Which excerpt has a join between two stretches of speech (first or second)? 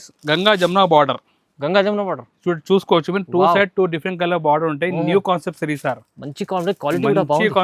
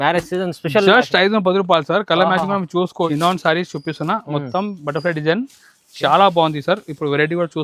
second